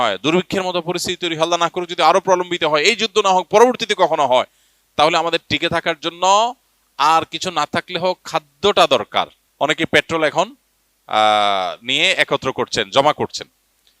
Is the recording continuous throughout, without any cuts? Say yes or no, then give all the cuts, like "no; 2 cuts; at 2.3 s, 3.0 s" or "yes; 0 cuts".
no; 1 cut; at 9.4 s